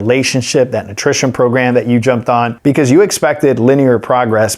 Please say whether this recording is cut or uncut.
cut